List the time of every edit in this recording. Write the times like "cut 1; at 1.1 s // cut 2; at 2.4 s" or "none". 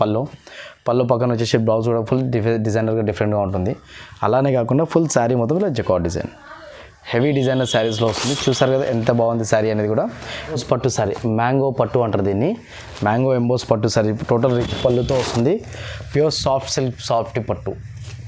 cut 1; at 10.6 s